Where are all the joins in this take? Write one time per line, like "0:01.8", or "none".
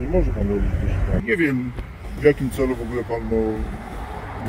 0:01.2